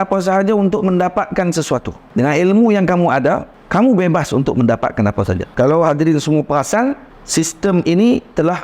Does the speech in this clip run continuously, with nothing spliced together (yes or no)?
no